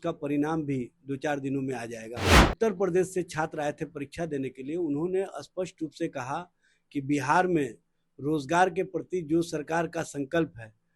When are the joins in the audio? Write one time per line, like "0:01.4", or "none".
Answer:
0:02.4